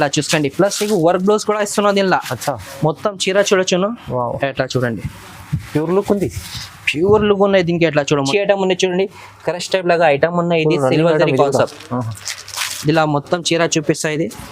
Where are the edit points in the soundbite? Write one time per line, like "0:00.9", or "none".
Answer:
0:08.3

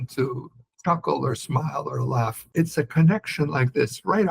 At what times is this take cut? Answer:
0:02.4

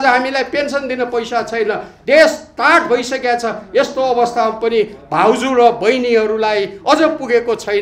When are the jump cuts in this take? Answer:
none

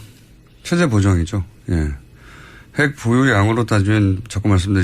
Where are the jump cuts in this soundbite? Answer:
0:02.1

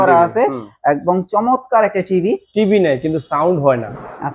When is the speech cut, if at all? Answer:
0:02.2

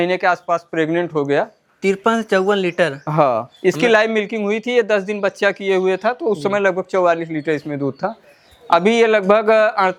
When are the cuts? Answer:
none

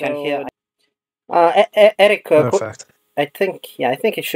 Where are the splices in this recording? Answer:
none

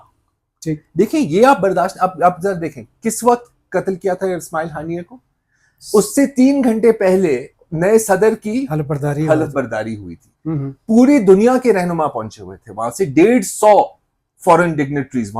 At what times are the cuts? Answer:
none

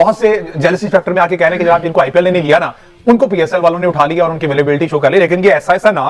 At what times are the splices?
none

